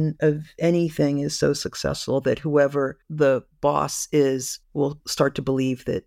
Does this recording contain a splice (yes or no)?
yes